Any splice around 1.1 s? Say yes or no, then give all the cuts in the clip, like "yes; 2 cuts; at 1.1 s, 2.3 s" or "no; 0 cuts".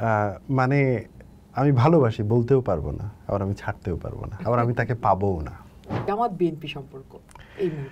no; 1 cut; at 6.0 s